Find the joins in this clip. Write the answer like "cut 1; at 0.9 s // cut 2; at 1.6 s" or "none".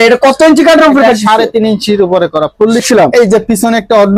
cut 1; at 2.8 s